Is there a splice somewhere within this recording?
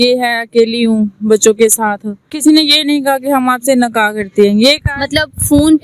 yes; 1 cut; at 2.4 s

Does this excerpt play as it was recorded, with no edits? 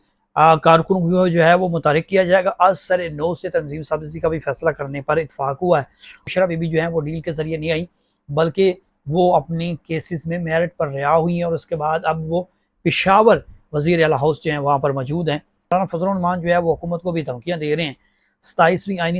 no; 2 cuts; at 6.0 s, 15.7 s

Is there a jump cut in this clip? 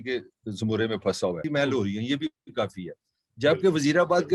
yes; 1 cut; at 1.4 s

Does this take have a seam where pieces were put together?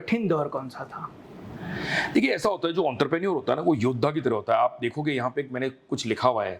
no; 0 cuts

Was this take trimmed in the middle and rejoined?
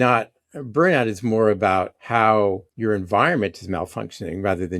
yes; 2 cuts; at 2.0 s, 2.7 s

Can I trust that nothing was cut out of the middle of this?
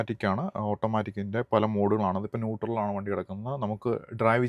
yes; 0 cuts

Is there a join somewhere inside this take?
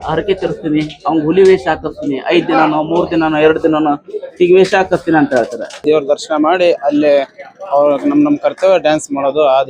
yes; 1 cut; at 5.8 s

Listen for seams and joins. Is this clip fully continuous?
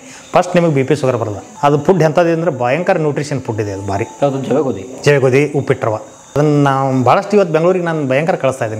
no; 3 cuts; at 1.4 s, 4.1 s, 6.4 s

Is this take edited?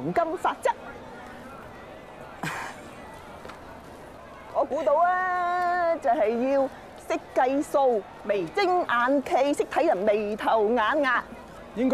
yes; 1 cut; at 4.2 s

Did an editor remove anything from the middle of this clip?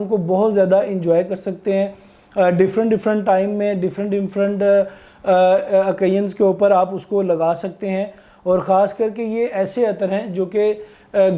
no; 0 cuts

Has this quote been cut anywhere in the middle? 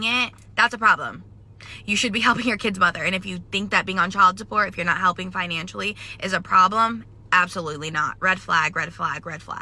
no; 0 cuts

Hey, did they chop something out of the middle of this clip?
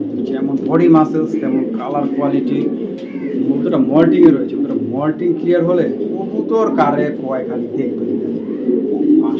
no; 0 cuts

